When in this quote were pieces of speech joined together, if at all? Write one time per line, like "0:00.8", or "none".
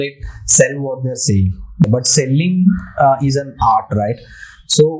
0:01.8

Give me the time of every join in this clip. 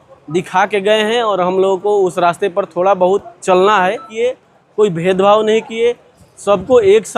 0:04.1

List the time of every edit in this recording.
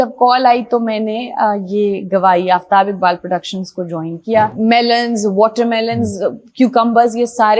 0:04.5

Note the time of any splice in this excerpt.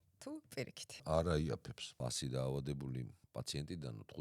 0:01.0
0:02.0

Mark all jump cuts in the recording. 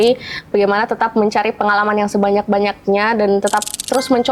none

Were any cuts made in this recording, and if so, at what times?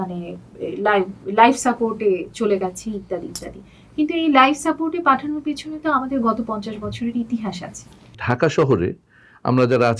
0:08.2

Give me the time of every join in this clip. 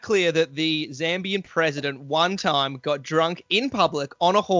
none

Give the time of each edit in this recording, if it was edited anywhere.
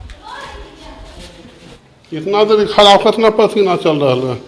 0:01.8

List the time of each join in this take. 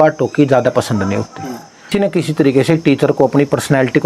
0:01.9

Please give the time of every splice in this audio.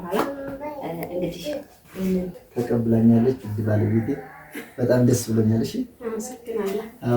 0:02.4

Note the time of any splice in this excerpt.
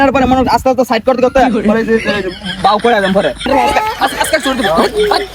0:03.4

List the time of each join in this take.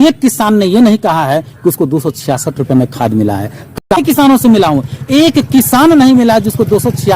0:03.9

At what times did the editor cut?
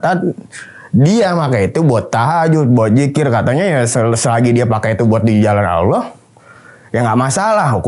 none

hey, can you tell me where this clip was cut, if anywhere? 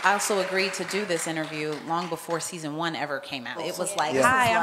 0:03.6

